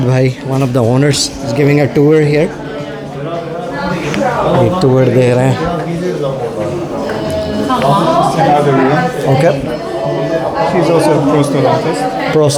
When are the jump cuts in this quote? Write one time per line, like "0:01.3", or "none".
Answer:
none